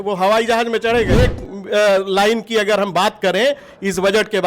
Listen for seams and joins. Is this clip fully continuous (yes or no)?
no